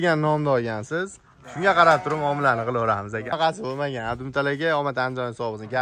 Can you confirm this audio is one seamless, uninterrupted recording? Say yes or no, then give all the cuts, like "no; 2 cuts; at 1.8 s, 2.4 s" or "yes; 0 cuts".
no; 1 cut; at 3.3 s